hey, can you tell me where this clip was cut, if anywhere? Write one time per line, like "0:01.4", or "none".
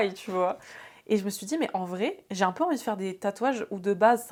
none